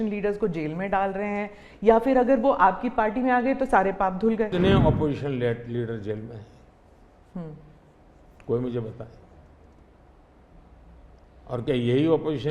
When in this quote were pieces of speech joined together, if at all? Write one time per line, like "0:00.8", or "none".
0:04.5